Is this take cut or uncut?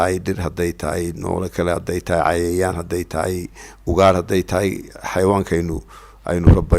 uncut